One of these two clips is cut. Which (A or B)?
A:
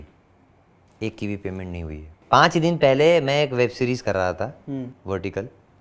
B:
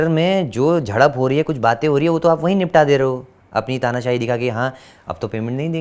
A